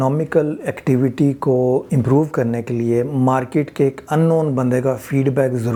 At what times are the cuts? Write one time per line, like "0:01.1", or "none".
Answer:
none